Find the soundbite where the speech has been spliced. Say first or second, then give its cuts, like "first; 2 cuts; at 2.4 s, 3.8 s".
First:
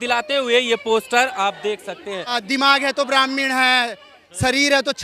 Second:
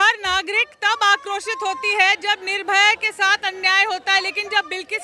first; 1 cut; at 2.4 s